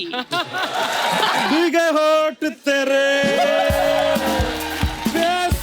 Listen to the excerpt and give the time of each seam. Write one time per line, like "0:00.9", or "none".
0:01.5